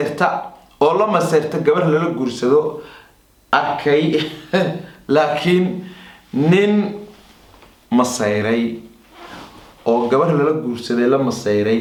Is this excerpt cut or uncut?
uncut